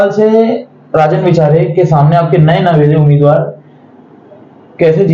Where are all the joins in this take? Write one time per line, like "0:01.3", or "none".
none